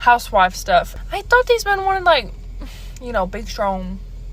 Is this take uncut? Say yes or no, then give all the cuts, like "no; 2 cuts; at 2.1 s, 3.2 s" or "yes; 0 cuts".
no; 1 cut; at 1.0 s